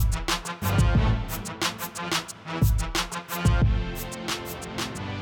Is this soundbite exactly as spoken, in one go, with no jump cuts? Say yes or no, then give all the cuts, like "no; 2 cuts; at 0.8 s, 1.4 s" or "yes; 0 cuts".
no; 1 cut; at 3.2 s